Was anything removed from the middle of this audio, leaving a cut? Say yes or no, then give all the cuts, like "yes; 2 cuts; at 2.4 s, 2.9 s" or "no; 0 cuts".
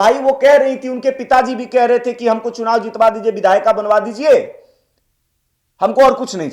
no; 0 cuts